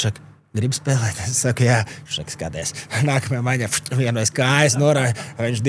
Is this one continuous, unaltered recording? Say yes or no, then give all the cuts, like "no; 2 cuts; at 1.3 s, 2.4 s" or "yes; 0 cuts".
yes; 0 cuts